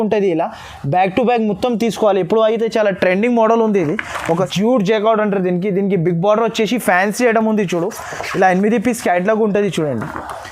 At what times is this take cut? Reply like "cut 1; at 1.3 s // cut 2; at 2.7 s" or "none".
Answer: cut 1; at 4.5 s